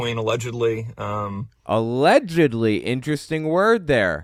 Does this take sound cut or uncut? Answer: uncut